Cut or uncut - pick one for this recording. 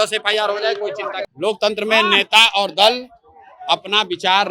cut